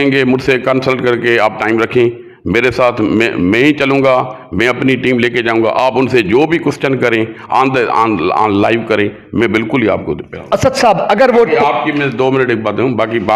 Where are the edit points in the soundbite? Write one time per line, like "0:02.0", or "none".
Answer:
none